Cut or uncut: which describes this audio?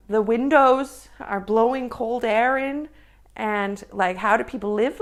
uncut